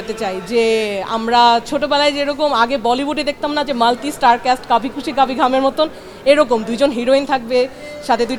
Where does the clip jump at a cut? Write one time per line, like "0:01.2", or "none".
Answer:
none